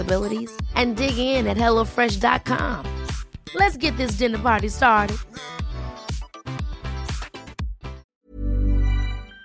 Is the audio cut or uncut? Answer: cut